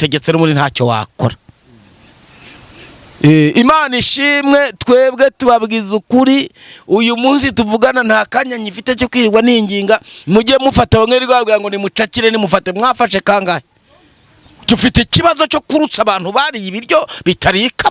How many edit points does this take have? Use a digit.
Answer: 0